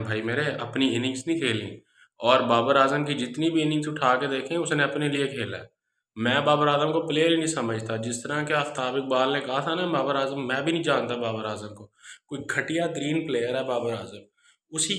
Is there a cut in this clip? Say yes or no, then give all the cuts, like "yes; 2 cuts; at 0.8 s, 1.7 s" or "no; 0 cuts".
no; 0 cuts